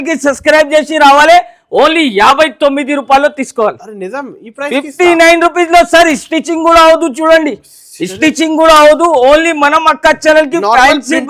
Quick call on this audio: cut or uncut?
uncut